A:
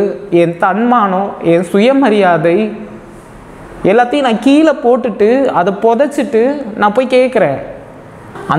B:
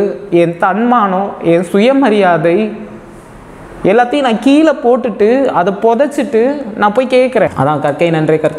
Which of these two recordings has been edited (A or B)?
B